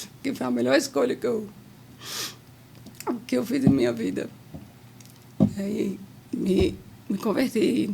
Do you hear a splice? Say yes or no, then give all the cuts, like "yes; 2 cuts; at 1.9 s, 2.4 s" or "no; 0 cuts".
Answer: no; 0 cuts